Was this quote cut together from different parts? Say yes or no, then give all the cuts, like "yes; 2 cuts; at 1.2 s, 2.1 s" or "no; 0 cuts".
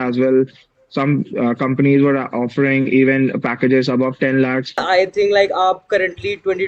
yes; 1 cut; at 4.8 s